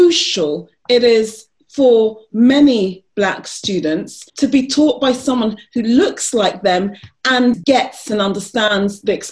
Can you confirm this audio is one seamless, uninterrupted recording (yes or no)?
no